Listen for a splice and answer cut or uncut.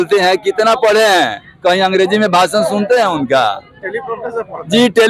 uncut